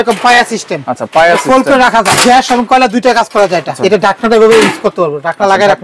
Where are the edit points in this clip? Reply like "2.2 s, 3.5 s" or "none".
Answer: 2.2 s, 3.7 s